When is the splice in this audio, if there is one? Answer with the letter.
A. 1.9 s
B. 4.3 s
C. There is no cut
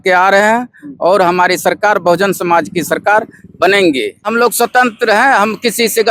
B